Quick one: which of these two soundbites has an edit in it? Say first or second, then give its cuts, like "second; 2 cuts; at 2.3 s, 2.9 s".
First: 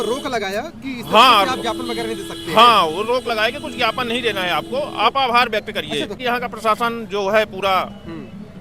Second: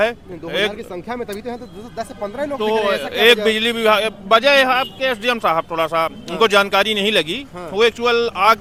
first; 1 cut; at 6.2 s